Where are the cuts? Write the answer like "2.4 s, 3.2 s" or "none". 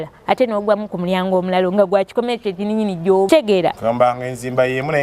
3.3 s